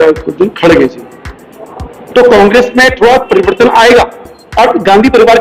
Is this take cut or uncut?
uncut